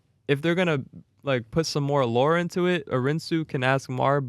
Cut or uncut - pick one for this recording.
cut